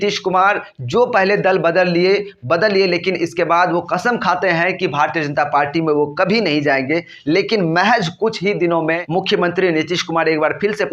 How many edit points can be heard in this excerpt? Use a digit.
1